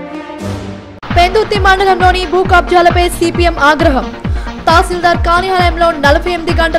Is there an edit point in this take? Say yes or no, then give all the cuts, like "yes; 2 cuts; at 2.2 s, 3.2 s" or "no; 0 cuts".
yes; 1 cut; at 1.0 s